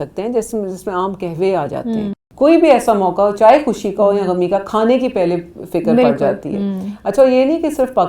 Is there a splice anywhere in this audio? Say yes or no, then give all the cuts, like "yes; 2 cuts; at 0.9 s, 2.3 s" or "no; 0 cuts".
yes; 1 cut; at 2.2 s